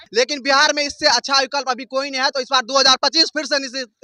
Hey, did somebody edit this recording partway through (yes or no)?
no